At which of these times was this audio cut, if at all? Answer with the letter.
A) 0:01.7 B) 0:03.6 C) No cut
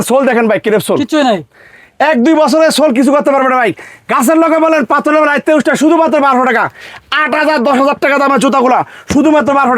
C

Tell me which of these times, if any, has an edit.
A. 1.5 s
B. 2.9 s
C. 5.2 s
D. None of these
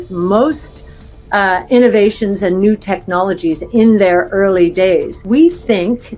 C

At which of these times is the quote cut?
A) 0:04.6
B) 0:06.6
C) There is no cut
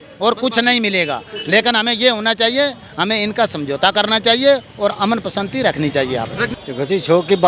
B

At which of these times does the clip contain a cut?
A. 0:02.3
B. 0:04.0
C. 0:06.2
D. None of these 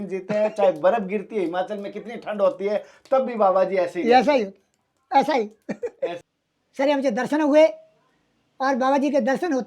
C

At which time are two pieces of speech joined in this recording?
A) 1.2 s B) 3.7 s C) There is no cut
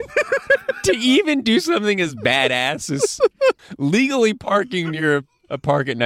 B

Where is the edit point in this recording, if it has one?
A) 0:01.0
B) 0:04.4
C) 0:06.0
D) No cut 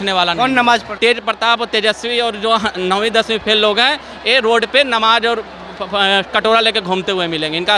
A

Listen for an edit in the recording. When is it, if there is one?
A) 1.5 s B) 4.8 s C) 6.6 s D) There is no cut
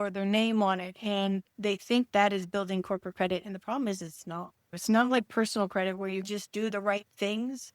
B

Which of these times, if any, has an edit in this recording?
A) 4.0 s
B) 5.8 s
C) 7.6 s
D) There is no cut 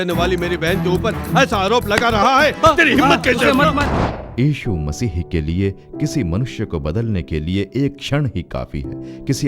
A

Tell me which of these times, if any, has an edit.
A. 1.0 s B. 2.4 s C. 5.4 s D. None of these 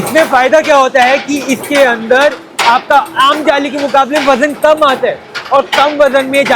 D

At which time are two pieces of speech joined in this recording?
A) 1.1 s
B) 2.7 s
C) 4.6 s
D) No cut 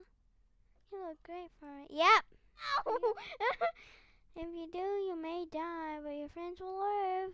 B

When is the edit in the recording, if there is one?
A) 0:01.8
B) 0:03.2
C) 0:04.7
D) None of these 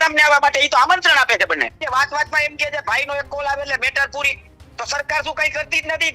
A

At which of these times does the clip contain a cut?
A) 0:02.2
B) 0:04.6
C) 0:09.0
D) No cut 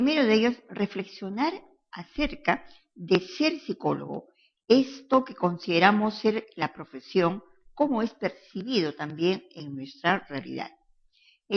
D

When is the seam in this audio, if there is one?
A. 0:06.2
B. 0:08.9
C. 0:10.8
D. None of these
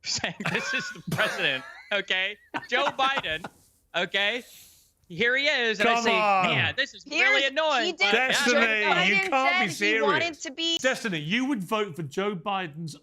C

